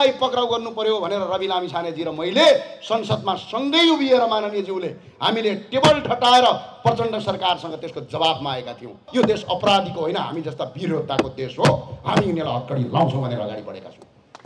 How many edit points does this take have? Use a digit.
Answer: 1